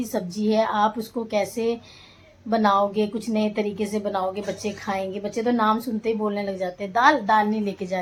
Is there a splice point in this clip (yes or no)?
no